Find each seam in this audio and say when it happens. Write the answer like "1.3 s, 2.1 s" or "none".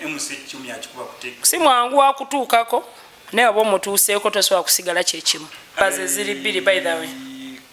5.8 s